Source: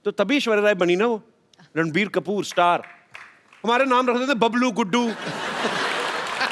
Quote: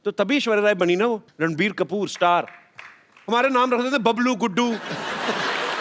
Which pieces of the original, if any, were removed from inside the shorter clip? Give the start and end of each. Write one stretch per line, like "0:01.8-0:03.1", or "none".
0:01.3-0:01.6